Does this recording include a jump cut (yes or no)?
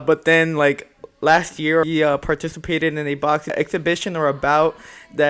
yes